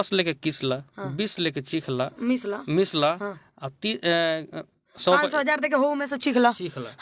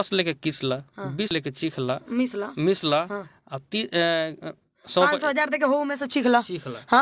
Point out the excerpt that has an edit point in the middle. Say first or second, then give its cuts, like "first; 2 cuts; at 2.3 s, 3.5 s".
second; 1 cut; at 1.3 s